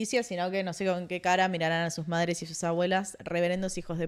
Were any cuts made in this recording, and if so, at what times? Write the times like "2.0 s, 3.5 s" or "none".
none